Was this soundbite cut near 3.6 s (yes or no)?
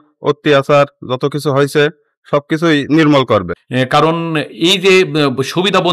yes